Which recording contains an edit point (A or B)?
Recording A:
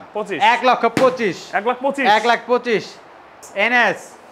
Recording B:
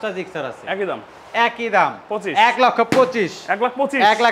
A